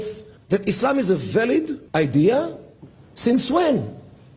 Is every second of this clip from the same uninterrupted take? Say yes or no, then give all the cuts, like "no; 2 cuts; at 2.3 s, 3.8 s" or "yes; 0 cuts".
no; 2 cuts; at 1.8 s, 2.7 s